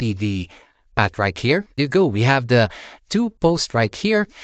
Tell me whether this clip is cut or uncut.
cut